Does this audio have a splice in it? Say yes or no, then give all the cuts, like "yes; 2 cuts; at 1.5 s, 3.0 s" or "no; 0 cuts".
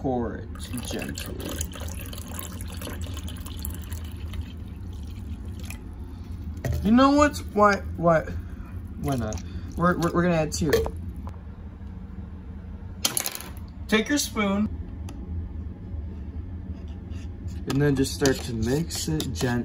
no; 0 cuts